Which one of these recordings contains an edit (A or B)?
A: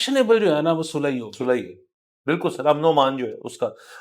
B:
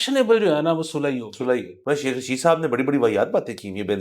B